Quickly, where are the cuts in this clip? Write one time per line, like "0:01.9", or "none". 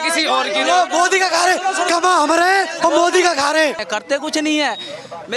0:03.8